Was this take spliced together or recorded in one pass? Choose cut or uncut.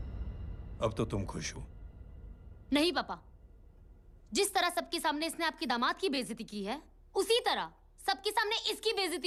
uncut